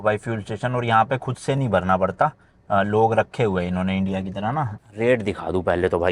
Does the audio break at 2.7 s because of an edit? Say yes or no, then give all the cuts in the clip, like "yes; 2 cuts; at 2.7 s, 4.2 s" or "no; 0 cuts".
no; 1 cut; at 4.8 s